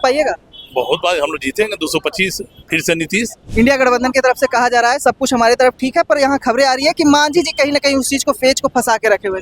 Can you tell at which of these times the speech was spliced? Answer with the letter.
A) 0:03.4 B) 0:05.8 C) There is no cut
A